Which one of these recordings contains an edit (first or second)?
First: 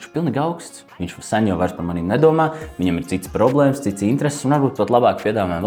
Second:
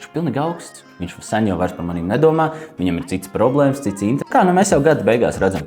second